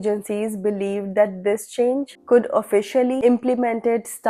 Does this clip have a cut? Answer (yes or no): no